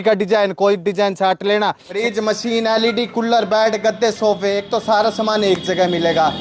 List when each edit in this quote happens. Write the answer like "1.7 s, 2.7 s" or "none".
2.0 s